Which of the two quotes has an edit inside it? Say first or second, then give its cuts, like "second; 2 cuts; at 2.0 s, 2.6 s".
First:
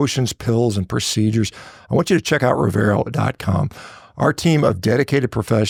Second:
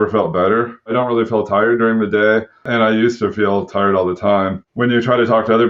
second; 3 cuts; at 0.9 s, 2.7 s, 4.6 s